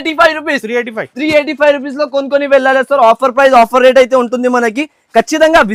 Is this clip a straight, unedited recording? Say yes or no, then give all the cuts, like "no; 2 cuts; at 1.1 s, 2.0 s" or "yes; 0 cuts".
yes; 0 cuts